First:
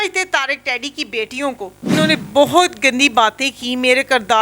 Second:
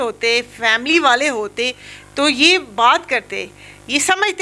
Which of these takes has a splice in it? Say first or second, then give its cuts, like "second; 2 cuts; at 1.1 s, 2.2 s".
first; 1 cut; at 1.8 s